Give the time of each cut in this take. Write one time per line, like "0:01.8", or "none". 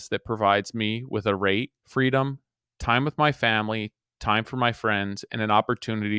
0:01.8

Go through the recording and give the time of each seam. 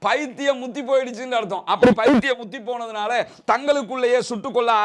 none

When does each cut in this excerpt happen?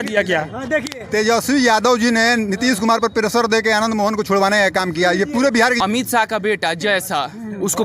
0:05.8

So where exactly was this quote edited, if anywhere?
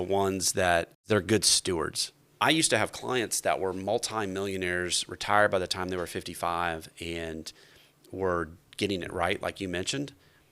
0:01.0
0:02.4

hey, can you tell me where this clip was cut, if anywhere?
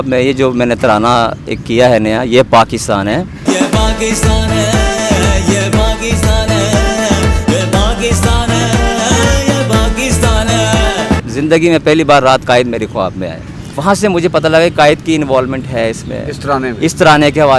0:11.3
0:13.7

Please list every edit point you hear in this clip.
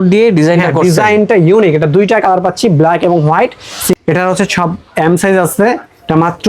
0:03.9

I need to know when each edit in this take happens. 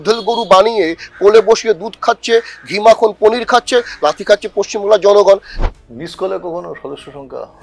0:05.6

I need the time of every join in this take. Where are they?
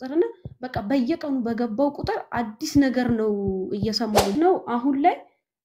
0:04.3

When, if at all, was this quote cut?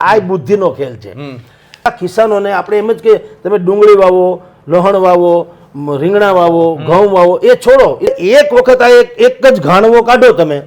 0:01.9
0:08.1

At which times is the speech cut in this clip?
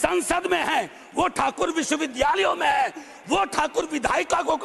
none

